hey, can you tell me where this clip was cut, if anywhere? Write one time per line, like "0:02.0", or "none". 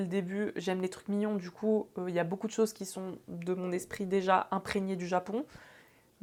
none